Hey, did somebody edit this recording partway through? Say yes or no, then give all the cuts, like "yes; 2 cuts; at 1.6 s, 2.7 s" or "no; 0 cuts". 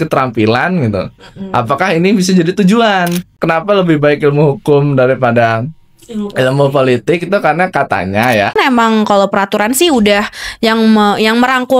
yes; 2 cuts; at 3.4 s, 8.5 s